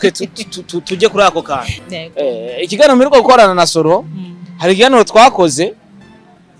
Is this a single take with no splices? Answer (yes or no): no